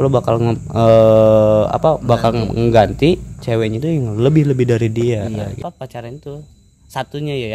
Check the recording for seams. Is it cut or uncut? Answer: cut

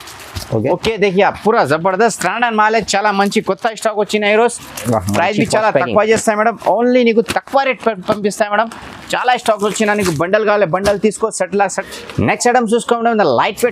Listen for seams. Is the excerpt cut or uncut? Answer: cut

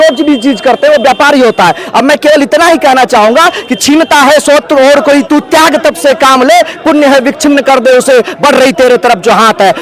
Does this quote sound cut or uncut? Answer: uncut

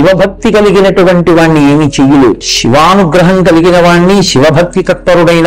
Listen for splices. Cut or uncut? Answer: cut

